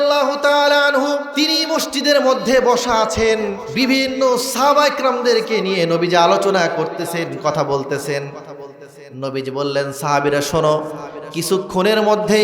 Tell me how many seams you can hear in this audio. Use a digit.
2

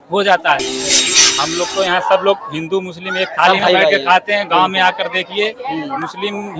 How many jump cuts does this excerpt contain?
1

